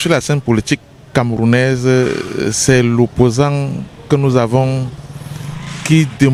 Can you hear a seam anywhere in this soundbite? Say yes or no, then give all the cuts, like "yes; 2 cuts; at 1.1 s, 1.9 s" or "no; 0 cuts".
no; 0 cuts